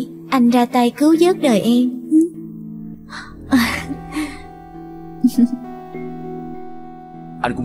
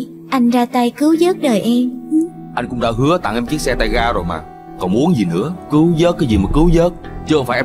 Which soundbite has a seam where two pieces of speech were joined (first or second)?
second